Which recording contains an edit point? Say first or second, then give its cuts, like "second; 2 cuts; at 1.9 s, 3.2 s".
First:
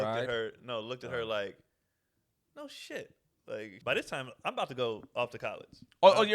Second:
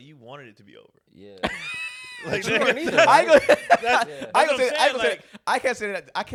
first; 1 cut; at 3.8 s